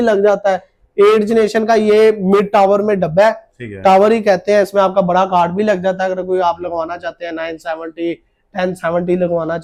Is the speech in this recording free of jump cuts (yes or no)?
yes